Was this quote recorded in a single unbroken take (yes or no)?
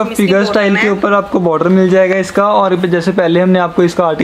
yes